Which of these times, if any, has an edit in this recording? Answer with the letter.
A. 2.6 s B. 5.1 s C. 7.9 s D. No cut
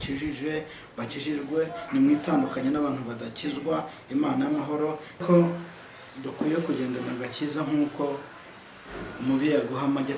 B